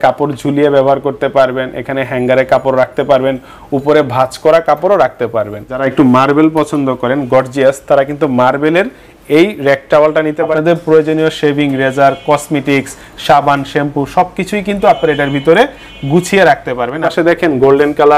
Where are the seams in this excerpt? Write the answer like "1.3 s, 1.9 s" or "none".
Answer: 5.9 s, 10.5 s, 17.0 s

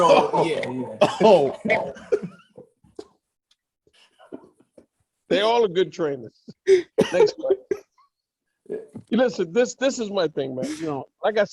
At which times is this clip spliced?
none

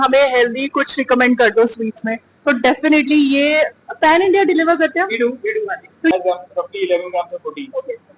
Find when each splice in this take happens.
6.1 s

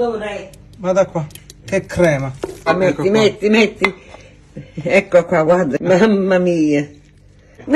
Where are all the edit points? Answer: 2.7 s

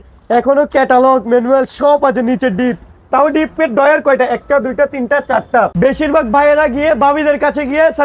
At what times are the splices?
5.7 s

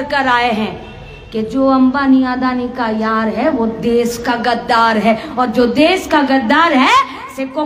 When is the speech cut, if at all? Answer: none

